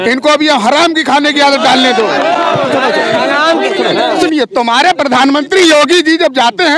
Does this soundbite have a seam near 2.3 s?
no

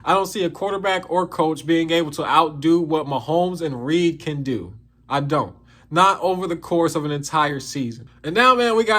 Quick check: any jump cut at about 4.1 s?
no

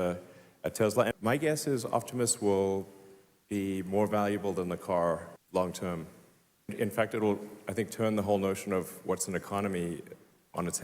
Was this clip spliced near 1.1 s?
yes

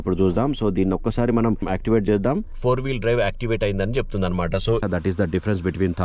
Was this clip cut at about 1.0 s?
no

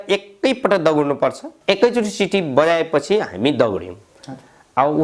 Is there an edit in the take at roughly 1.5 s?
yes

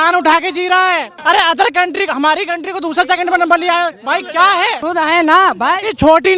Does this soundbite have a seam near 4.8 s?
yes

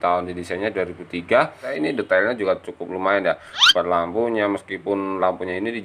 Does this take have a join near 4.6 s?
no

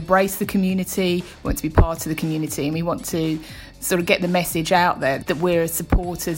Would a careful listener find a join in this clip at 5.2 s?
yes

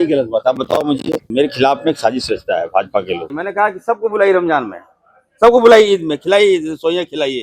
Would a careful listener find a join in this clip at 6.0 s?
no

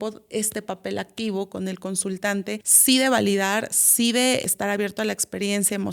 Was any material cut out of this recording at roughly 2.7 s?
yes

